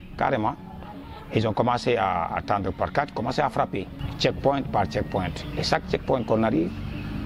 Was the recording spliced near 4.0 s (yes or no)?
yes